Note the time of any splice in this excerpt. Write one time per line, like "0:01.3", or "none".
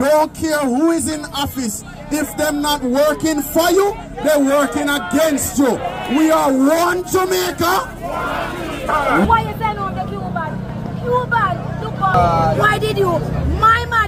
none